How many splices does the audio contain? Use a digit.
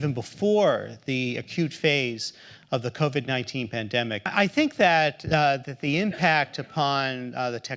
1